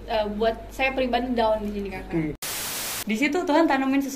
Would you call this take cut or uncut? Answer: cut